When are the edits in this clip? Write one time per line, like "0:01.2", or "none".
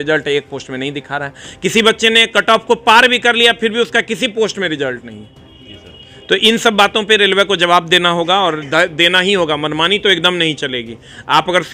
none